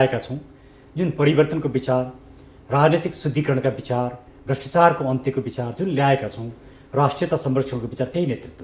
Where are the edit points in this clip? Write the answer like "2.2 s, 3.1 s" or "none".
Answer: none

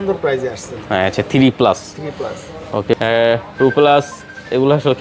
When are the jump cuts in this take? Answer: 3.0 s

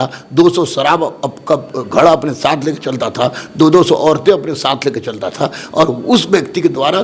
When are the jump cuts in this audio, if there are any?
none

